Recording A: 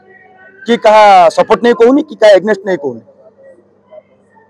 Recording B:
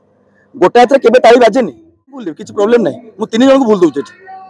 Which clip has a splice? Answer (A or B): B